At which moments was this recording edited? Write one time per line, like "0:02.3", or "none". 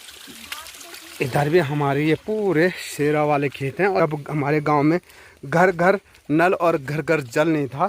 0:04.0